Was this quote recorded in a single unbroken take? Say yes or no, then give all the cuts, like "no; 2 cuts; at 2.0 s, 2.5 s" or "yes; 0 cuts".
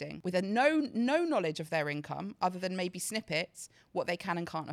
yes; 0 cuts